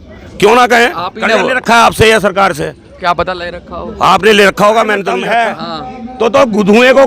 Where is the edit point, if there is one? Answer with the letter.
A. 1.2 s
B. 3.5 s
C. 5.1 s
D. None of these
C